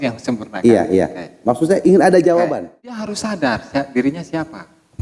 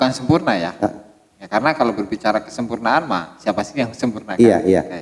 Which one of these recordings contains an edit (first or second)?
first